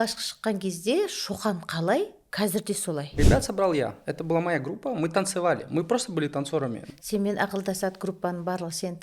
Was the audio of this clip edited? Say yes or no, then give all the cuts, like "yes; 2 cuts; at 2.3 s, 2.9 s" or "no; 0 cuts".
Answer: yes; 3 cuts; at 2.2 s, 3.1 s, 6.8 s